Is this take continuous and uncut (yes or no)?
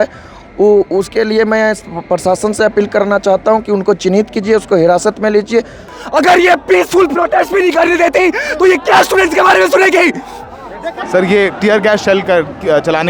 no